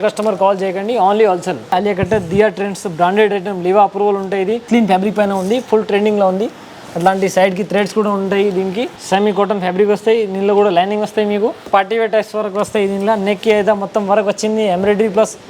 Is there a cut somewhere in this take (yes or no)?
yes